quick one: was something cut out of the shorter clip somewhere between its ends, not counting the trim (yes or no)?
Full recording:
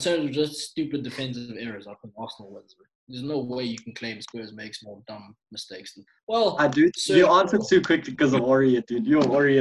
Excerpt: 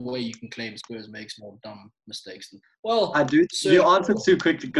no